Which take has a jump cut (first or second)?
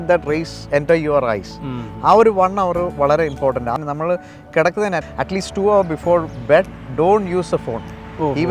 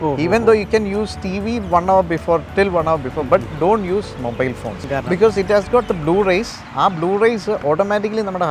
first